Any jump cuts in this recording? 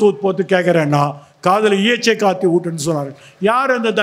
no; 0 cuts

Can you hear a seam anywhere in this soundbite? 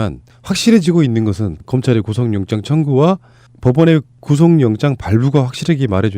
yes; 1 cut; at 4.5 s

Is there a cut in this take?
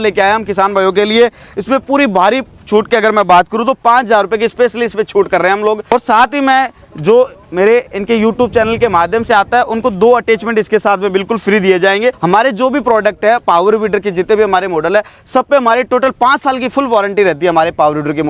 yes; 2 cuts; at 5.9 s, 12.2 s

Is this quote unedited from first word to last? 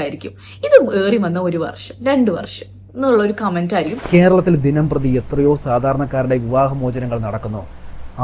no; 1 cut; at 4.0 s

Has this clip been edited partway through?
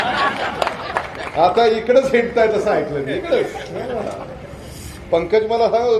no; 0 cuts

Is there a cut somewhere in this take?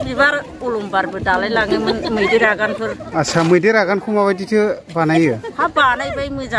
no; 0 cuts

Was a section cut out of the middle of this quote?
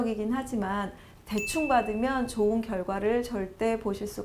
no; 0 cuts

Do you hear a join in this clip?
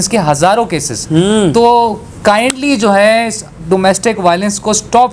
no; 0 cuts

